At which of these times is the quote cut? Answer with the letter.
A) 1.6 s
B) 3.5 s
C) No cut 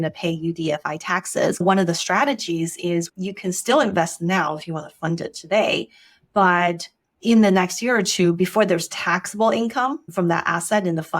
A